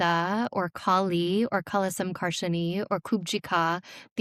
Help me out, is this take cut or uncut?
uncut